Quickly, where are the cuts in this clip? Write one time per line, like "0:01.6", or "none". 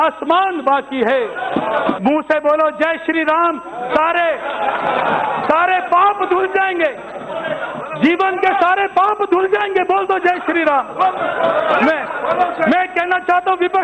0:02.0

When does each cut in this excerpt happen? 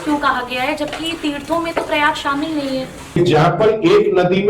0:03.2

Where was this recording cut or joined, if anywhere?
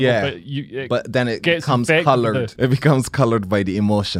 0:02.5

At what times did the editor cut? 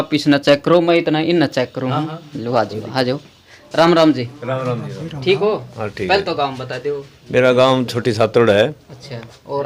none

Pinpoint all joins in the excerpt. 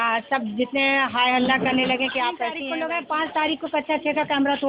0:02.6

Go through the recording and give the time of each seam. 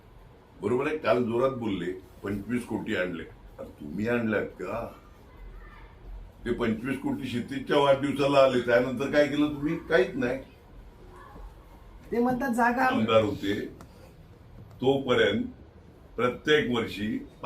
0:12.9

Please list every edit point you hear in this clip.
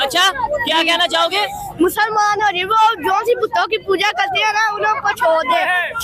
none

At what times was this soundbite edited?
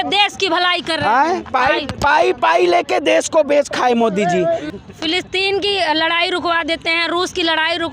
0:04.7

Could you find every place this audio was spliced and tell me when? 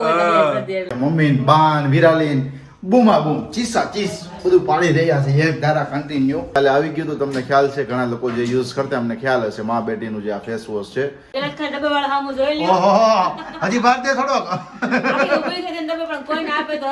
0:00.9
0:06.5
0:11.2

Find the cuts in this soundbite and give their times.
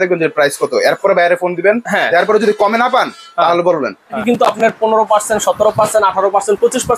0:04.2

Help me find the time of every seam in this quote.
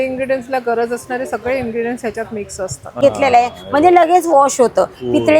0:03.0

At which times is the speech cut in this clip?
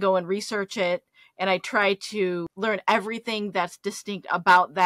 0:02.5

